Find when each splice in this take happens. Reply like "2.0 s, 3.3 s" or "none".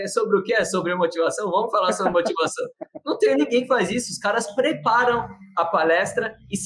none